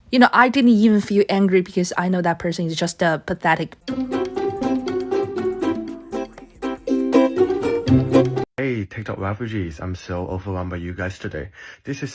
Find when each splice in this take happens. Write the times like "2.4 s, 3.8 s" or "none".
3.8 s, 8.4 s